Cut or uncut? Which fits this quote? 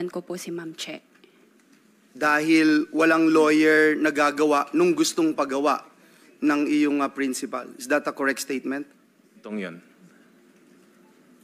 cut